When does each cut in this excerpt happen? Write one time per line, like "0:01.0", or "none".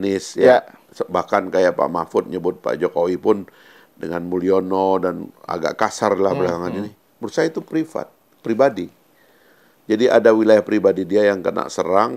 none